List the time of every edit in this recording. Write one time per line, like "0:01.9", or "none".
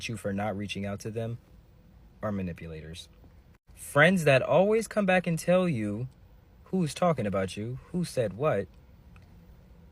none